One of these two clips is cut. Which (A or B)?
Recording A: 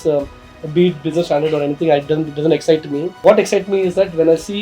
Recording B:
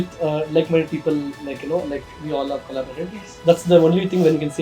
A